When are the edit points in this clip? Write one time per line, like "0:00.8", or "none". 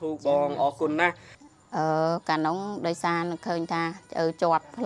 0:01.3